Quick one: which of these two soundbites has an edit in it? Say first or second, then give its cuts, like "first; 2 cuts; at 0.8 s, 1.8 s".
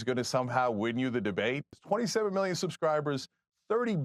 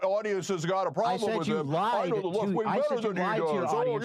first; 1 cut; at 1.8 s